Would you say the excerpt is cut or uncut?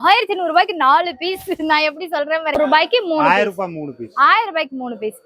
cut